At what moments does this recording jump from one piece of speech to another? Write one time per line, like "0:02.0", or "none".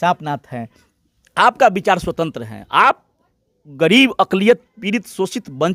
none